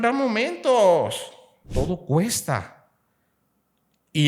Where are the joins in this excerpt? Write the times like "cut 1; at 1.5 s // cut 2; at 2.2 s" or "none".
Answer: cut 1; at 1.6 s

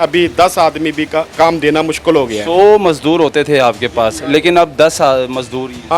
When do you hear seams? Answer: cut 1; at 1.3 s

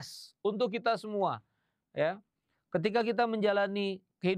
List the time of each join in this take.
none

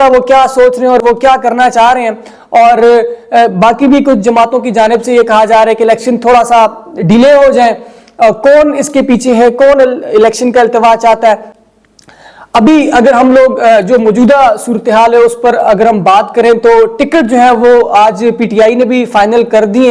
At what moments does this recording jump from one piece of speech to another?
none

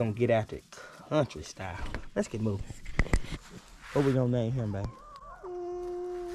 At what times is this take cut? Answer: cut 1; at 3.3 s

